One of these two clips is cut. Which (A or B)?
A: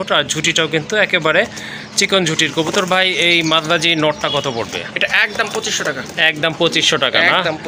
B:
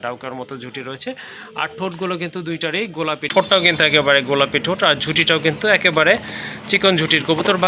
B